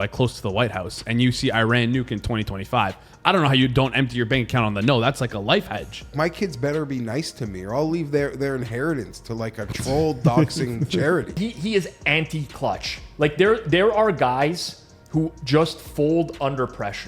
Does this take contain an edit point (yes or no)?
yes